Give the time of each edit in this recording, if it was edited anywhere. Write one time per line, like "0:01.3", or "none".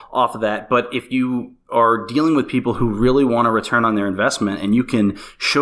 none